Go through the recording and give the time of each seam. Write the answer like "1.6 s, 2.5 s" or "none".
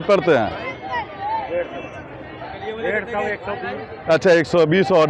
none